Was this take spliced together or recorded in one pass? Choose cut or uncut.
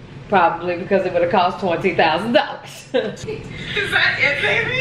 cut